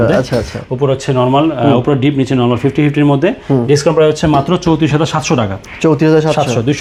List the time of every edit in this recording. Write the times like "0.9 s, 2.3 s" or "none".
none